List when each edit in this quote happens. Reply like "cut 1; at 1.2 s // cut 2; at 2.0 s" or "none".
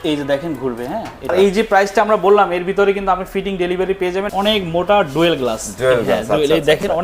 cut 1; at 1.3 s // cut 2; at 4.3 s